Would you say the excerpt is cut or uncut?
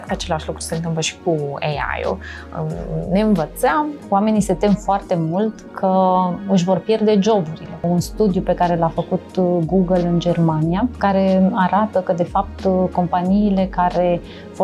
cut